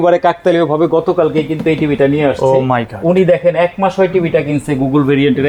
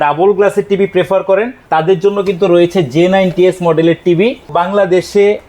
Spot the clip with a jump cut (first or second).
second